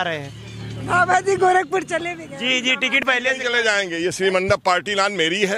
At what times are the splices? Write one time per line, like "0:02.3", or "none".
none